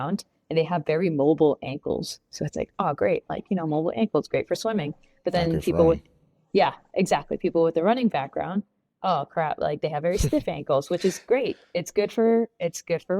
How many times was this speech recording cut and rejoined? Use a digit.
0